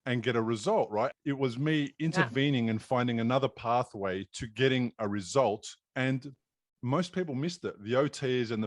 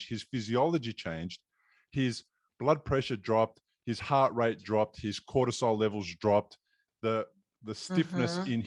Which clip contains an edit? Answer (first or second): first